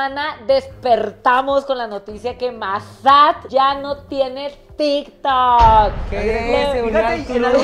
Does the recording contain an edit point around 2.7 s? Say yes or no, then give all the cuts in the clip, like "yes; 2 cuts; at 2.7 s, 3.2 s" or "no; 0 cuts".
no; 0 cuts